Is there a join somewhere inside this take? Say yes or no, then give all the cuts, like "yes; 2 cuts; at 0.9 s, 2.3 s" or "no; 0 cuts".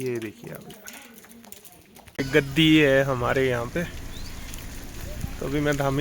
yes; 1 cut; at 2.2 s